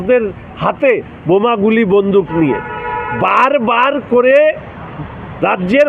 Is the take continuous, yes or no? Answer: yes